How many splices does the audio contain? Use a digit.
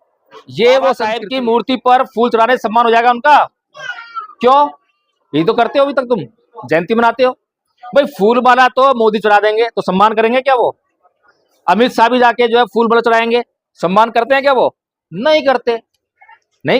1